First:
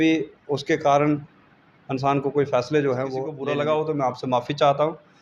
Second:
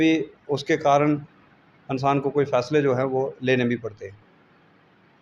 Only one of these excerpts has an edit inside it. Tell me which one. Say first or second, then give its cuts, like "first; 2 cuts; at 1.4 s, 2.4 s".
first; 1 cut; at 3.3 s